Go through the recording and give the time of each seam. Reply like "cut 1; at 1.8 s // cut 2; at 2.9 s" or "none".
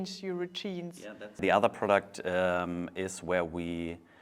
cut 1; at 1.4 s